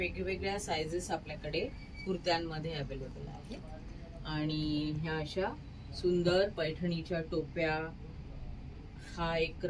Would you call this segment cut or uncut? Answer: uncut